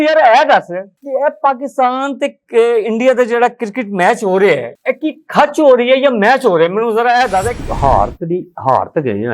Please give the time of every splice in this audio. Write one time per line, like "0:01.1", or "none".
0:07.6